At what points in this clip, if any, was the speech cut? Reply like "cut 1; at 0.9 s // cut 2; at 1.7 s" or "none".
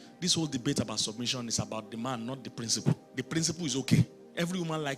cut 1; at 3.1 s